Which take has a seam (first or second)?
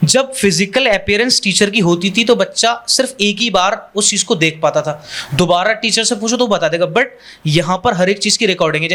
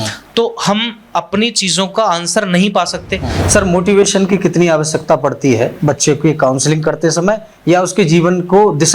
second